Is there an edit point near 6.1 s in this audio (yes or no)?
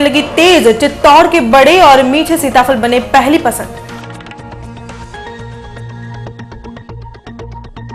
no